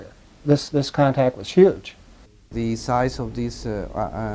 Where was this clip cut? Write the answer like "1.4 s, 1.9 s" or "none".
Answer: 2.5 s